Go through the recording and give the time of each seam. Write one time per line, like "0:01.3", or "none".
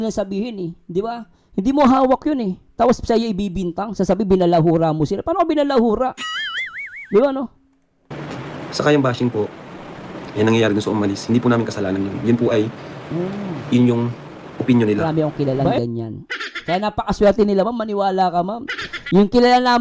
0:15.3